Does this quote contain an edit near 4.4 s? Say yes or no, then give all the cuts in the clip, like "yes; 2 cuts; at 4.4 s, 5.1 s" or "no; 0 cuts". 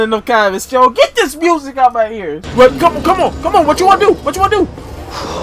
no; 1 cut; at 2.4 s